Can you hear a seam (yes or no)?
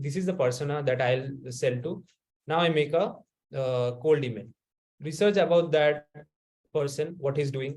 no